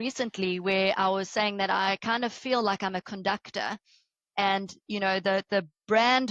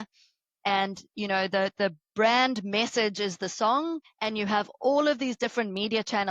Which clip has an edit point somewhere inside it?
second; 1 cut; at 4.1 s

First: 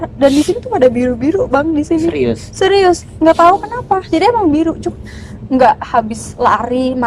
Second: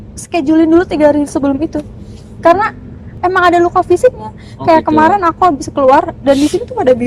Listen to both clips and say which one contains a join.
second; 1 cut; at 3.1 s

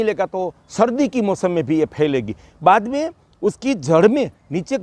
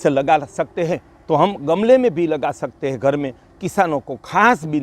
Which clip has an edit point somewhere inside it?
second; 1 cut; at 1.1 s

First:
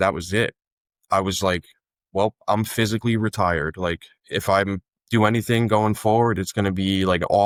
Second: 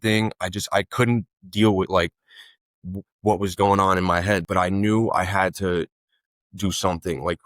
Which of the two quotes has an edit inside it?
second; 1 cut; at 4.5 s

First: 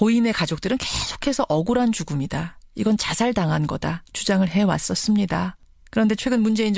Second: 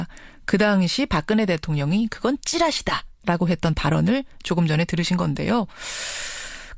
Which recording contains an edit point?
second; 1 cut; at 3.6 s

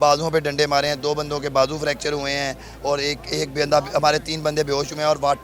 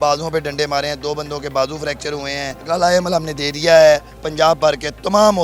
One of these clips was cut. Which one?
second; 1 cut; at 2.6 s

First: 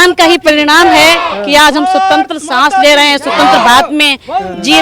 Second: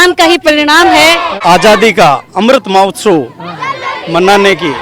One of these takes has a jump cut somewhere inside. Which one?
second; 1 cut; at 1.3 s

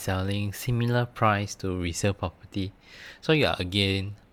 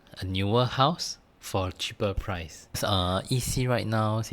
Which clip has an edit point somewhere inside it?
second; 1 cut; at 2.8 s

